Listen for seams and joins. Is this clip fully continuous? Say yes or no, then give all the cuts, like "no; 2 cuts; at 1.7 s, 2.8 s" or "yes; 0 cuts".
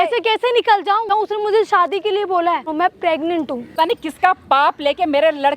no; 3 cuts; at 1.1 s, 2.7 s, 3.7 s